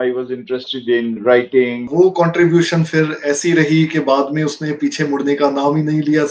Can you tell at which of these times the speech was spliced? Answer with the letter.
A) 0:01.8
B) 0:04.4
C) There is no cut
A